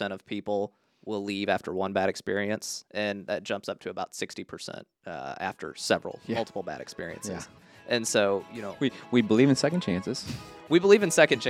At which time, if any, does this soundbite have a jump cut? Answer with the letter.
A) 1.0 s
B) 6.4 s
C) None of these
C